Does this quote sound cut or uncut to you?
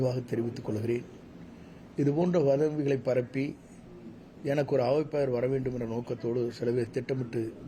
uncut